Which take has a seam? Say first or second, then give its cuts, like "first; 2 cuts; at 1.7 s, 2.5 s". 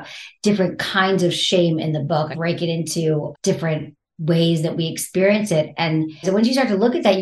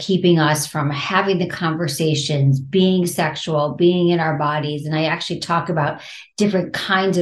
first; 3 cuts; at 2.3 s, 3.7 s, 6.2 s